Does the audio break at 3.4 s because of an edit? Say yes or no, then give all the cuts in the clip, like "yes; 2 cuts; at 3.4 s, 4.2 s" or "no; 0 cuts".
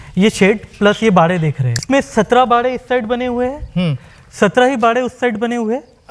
no; 1 cut; at 1.8 s